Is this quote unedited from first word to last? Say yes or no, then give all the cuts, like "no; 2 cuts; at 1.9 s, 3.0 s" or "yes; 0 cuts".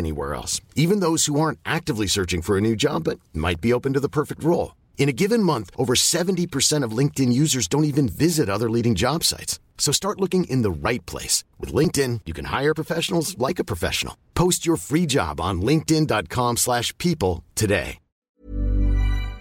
no; 1 cut; at 18.4 s